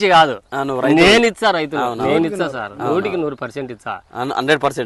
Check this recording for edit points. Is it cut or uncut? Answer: uncut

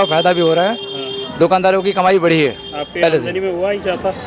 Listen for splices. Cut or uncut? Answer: uncut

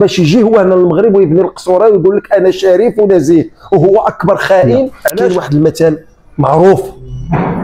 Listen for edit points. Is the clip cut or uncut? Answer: cut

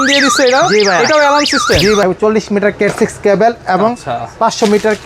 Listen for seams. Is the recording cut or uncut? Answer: cut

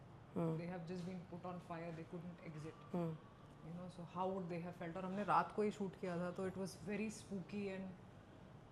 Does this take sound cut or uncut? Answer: uncut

